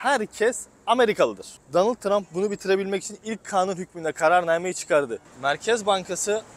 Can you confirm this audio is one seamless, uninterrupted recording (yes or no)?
no